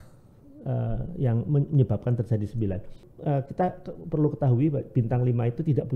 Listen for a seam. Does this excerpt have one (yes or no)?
yes